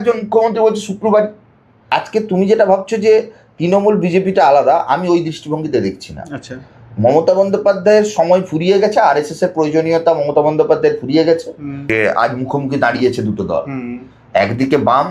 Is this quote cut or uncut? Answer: cut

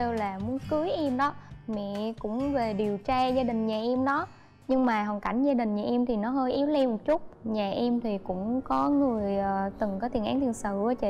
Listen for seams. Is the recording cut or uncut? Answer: uncut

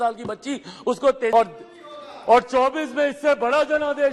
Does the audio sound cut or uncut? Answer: cut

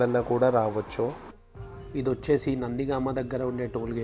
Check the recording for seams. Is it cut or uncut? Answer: uncut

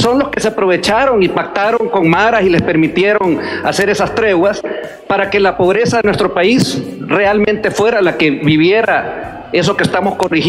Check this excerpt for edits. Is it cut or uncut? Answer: uncut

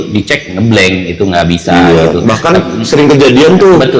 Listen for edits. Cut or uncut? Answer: uncut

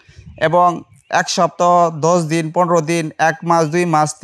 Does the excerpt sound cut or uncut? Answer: uncut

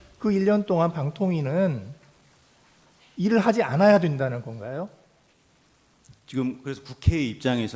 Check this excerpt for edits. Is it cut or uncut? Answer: uncut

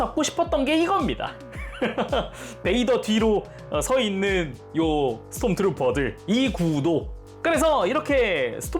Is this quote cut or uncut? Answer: uncut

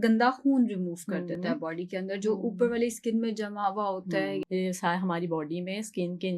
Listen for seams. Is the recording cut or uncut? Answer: cut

